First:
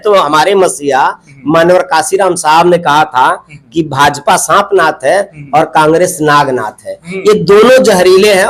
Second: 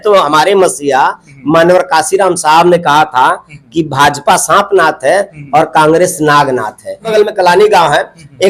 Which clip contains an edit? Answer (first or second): second